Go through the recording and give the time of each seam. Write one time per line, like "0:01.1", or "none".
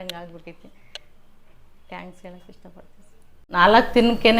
0:03.4